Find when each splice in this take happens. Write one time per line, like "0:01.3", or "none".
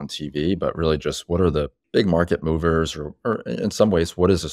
0:01.8